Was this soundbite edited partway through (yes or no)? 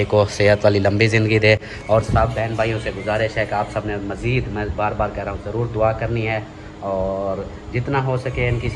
no